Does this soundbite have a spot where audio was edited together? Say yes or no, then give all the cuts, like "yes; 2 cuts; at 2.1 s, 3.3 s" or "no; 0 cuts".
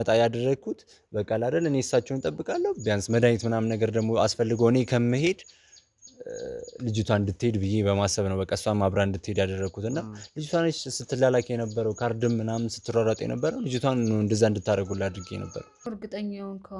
yes; 1 cut; at 15.9 s